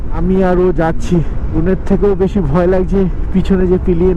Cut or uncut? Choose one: uncut